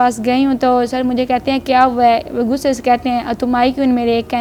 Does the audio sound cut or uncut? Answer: uncut